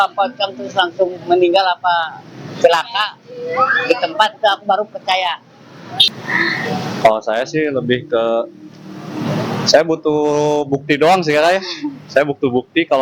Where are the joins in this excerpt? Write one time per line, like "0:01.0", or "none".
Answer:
none